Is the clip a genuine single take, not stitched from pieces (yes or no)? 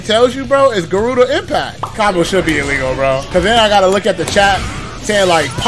no